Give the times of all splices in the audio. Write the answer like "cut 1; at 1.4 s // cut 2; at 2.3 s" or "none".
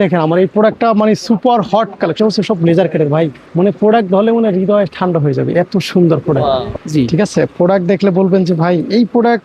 cut 1; at 2.2 s // cut 2; at 6.7 s